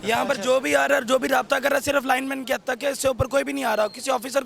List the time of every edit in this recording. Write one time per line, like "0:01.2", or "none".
none